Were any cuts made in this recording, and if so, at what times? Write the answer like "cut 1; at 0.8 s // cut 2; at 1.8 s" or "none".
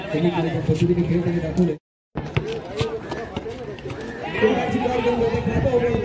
cut 1; at 2.0 s